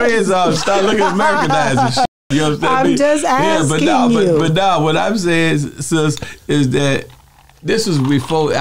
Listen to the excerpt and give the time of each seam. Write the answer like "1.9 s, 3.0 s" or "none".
none